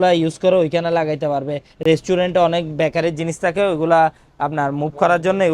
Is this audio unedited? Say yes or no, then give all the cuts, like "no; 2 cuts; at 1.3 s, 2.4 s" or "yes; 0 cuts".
yes; 0 cuts